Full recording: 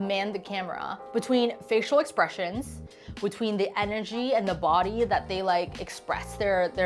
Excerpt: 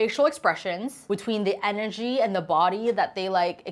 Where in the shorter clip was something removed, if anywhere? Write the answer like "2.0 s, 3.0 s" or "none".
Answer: 1.0 s